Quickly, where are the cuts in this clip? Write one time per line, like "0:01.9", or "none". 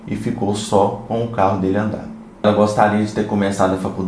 0:02.4